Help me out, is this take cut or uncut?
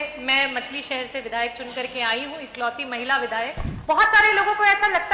cut